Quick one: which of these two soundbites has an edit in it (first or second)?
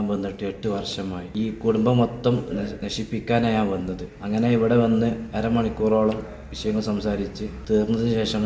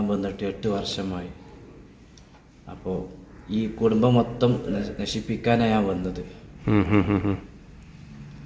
first